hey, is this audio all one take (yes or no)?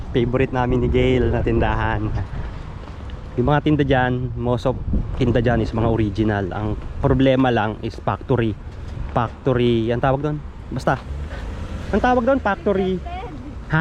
yes